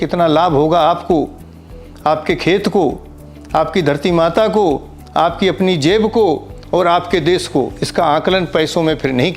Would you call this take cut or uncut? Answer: uncut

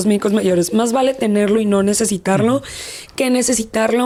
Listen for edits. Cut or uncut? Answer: uncut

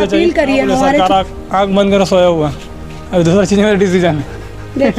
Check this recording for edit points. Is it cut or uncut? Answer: cut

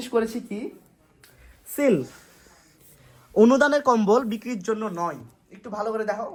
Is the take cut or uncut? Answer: uncut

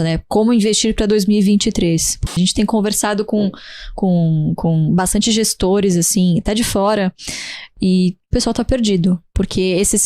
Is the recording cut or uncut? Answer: cut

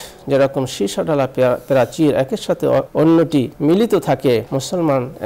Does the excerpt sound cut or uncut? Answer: cut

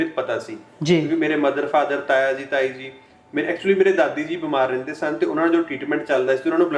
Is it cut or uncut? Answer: uncut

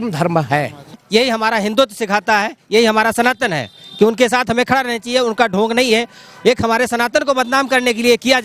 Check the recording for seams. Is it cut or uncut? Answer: cut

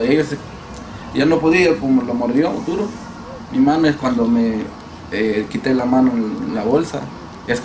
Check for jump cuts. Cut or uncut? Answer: uncut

